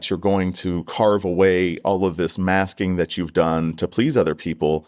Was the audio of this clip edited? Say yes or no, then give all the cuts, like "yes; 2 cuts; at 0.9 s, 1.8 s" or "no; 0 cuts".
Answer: no; 0 cuts